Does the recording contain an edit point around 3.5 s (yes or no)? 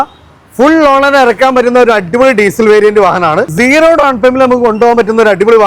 yes